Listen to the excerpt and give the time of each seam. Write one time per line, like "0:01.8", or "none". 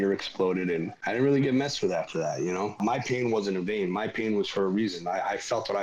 0:01.0
0:02.8